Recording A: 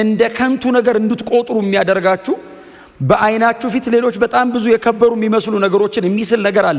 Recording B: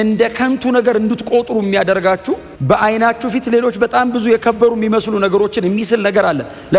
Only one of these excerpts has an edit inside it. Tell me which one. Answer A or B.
B